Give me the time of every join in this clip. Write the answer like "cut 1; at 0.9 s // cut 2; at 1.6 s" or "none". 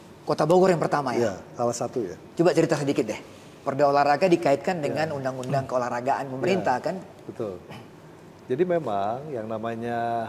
none